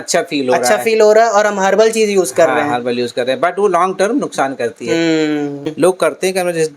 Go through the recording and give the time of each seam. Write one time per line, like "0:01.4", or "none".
0:05.7